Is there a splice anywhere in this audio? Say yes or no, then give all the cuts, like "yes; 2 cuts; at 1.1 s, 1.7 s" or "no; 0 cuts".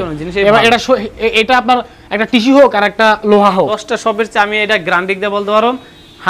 yes; 1 cut; at 3.8 s